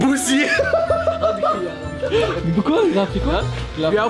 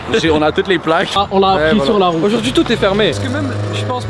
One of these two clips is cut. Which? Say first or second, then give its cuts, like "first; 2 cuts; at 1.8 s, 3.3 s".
second; 2 cuts; at 1.2 s, 3.1 s